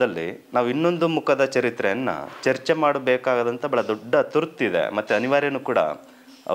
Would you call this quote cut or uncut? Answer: uncut